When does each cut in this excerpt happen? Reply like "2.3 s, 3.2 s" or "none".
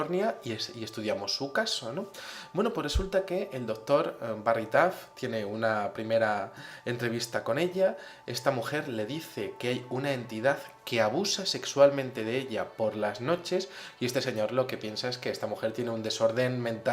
15.8 s

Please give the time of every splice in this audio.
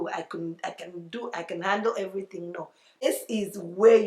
2.9 s

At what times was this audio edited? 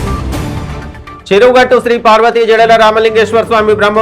1.0 s

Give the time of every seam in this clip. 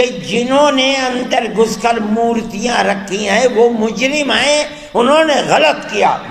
none

